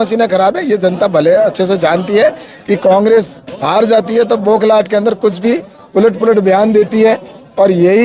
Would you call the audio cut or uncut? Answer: uncut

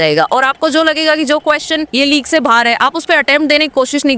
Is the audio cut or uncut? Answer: cut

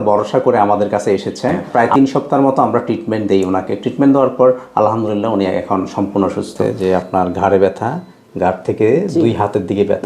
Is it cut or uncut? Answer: cut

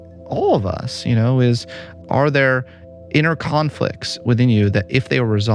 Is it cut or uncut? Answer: cut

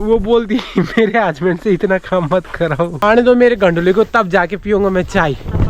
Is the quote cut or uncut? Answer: cut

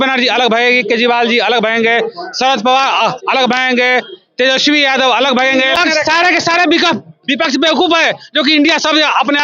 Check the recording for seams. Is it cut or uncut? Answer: cut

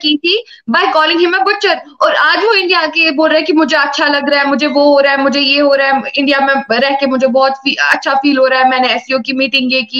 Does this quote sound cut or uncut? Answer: uncut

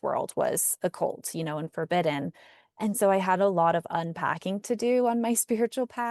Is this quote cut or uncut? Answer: uncut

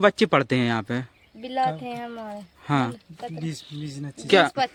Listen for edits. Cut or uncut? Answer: uncut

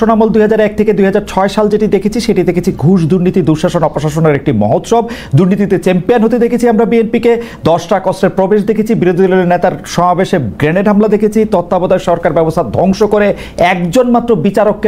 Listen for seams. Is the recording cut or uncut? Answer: uncut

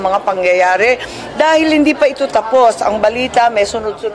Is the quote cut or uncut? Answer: uncut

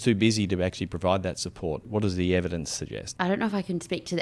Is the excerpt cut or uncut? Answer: cut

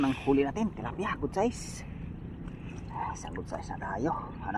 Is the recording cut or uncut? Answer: uncut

